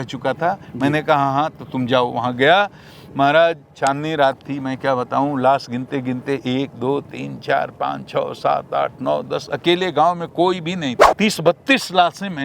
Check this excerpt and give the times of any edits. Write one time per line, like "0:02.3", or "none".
0:11.0